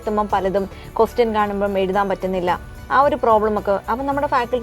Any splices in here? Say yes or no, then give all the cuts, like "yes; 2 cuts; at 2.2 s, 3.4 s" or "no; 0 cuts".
no; 0 cuts